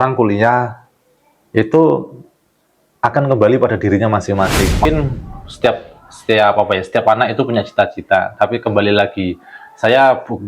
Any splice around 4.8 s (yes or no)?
yes